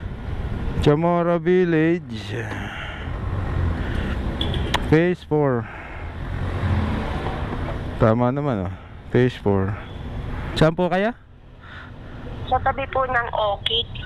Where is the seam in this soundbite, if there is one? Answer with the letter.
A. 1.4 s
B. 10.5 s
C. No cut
B